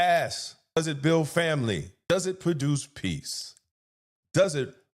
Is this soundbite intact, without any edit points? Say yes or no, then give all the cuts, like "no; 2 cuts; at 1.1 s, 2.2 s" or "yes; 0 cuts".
no; 2 cuts; at 0.8 s, 1.9 s